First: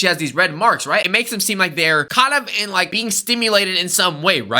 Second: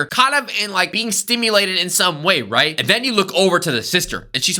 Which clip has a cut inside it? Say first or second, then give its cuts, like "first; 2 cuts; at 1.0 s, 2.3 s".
first; 1 cut; at 1.1 s